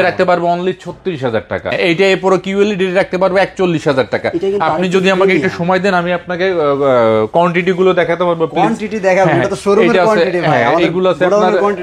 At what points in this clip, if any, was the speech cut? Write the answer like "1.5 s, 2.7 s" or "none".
1.7 s